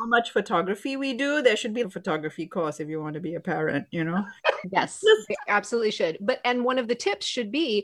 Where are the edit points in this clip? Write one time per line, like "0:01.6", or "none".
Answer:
none